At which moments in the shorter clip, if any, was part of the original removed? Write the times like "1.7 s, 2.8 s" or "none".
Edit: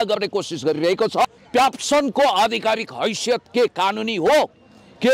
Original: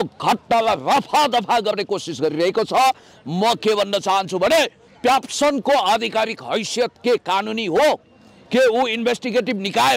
1.2 s